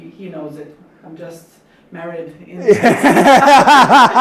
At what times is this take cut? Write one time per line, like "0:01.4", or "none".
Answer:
none